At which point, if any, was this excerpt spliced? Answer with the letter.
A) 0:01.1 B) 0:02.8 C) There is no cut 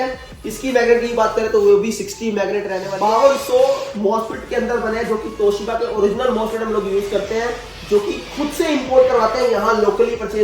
B